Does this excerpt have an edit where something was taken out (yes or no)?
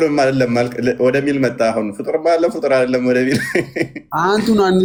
no